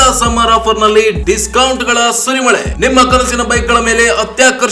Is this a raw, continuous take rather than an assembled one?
yes; 0 cuts

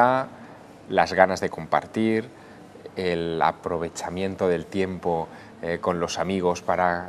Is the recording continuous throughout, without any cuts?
no; 1 cut; at 2.4 s

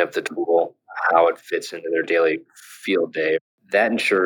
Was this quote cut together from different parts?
yes; 2 cuts; at 2.1 s, 3.4 s

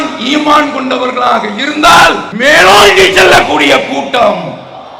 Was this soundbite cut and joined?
yes; 1 cut; at 2.3 s

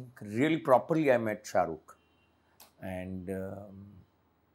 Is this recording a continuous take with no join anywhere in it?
yes; 0 cuts

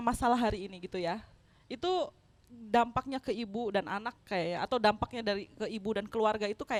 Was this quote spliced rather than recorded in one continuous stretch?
no; 0 cuts

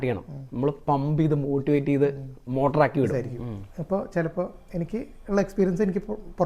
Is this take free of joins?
no; 1 cut; at 3.1 s

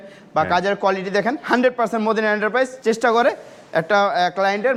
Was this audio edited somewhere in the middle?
no; 0 cuts

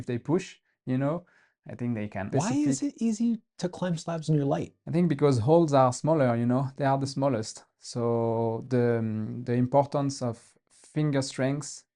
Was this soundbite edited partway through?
yes; 2 cuts; at 2.2 s, 4.8 s

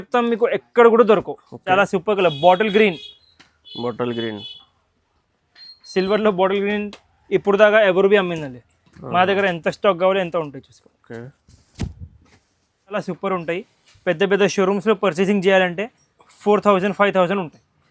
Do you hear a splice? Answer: yes; 2 cuts; at 1.6 s, 13.0 s

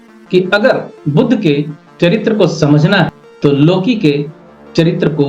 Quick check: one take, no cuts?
no; 1 cut; at 3.2 s

